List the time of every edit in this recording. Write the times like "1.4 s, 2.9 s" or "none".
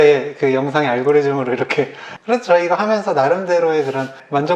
2.1 s